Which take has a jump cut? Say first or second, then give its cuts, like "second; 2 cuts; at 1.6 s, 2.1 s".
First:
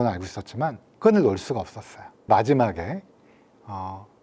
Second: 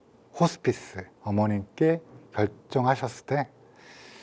second; 1 cut; at 1.1 s